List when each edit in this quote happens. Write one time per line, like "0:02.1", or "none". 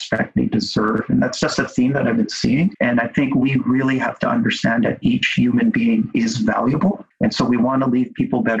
0:02.8
0:07.1